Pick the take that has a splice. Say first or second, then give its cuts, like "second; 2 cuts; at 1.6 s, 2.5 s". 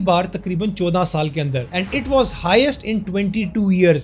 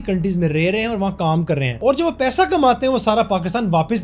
second; 1 cut; at 1.7 s